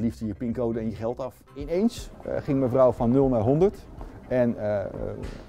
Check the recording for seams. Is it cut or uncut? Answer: cut